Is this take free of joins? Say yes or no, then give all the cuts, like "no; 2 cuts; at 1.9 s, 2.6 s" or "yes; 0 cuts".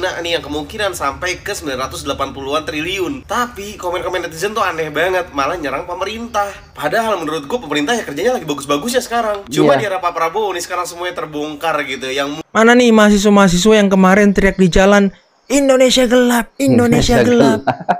no; 1 cut; at 12.4 s